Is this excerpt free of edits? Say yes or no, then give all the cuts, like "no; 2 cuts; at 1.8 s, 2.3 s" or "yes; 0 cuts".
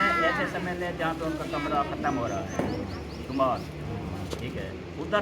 yes; 0 cuts